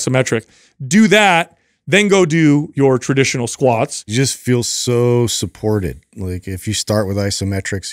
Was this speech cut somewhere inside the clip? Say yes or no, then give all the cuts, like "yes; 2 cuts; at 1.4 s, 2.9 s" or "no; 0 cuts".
yes; 1 cut; at 4.0 s